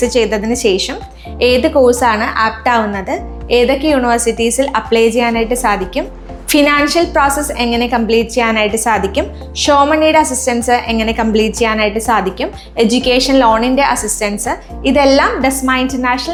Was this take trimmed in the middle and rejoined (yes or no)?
no